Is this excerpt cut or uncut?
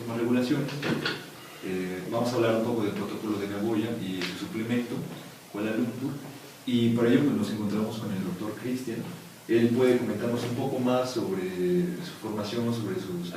cut